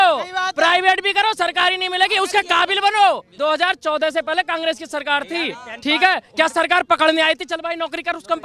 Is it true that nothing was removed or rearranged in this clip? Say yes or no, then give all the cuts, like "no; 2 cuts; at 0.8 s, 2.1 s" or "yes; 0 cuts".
no; 1 cut; at 3.3 s